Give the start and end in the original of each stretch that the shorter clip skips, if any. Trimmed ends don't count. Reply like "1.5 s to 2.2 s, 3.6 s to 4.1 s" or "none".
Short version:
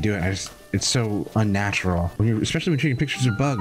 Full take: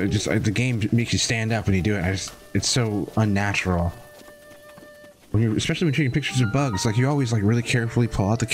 3.9 s to 5.3 s